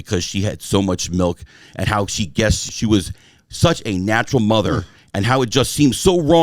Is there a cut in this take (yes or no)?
yes